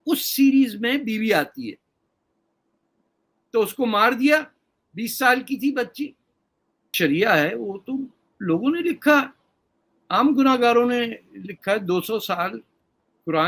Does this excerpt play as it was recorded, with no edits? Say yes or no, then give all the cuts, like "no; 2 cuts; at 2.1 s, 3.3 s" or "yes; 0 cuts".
no; 1 cut; at 6.9 s